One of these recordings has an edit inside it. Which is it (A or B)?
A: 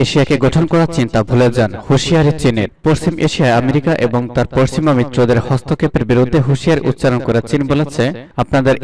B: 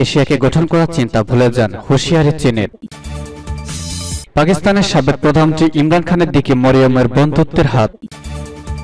B